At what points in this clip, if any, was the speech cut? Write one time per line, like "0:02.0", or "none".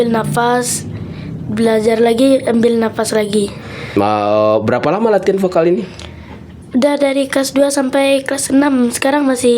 0:03.9